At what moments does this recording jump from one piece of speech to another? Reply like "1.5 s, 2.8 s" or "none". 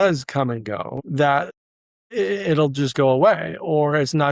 none